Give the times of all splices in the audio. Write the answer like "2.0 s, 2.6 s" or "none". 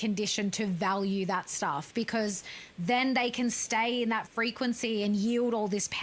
none